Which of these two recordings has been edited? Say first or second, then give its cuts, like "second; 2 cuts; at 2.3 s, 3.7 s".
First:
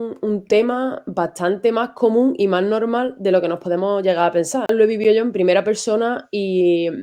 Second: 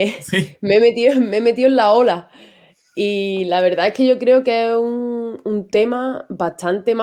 first; 1 cut; at 4.7 s